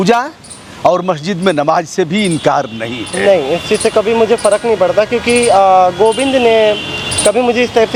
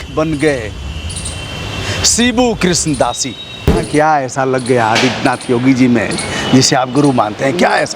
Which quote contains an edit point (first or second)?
second